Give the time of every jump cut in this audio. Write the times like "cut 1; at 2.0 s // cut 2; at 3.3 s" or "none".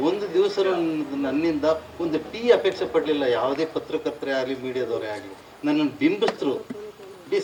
none